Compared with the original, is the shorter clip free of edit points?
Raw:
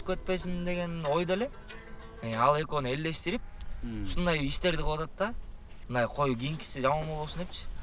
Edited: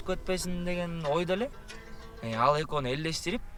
yes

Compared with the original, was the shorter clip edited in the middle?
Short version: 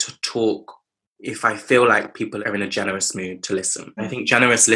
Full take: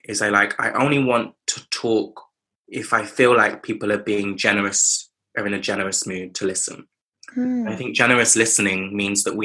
yes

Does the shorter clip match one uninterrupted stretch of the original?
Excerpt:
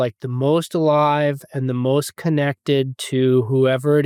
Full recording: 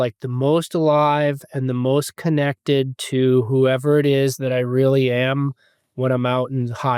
yes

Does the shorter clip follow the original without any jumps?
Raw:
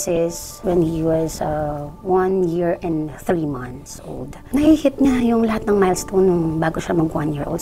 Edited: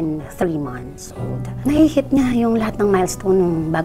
yes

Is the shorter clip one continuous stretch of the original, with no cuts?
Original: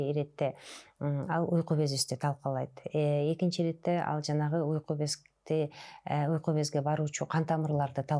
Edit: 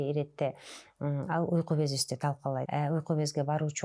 no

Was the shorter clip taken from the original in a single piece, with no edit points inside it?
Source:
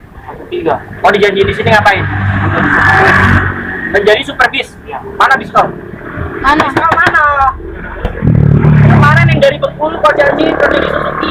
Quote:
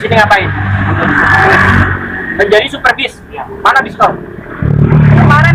no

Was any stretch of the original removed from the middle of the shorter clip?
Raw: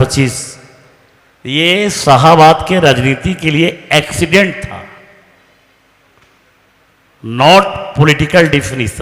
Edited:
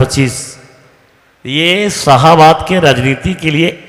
no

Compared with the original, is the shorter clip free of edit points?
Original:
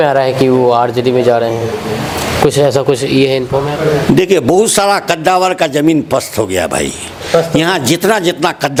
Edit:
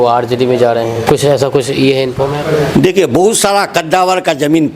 no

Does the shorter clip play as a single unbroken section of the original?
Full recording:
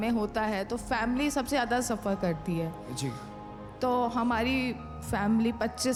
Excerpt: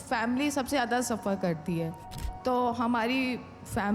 no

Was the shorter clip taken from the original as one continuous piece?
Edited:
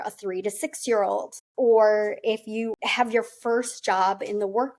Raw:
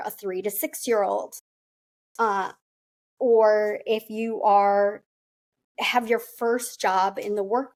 no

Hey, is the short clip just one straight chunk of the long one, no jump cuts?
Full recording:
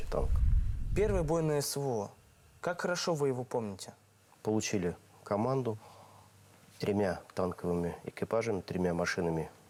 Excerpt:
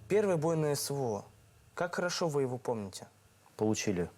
yes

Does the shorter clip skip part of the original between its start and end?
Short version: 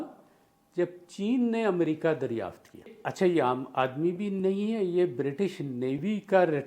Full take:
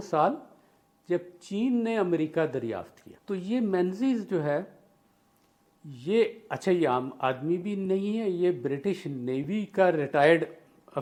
yes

